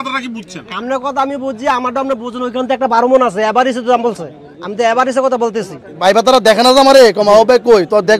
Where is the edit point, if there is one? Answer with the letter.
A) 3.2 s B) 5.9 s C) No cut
B